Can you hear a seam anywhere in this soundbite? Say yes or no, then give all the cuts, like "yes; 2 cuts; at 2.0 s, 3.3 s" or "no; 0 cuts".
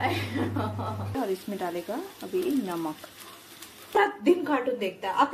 yes; 2 cuts; at 1.2 s, 4.0 s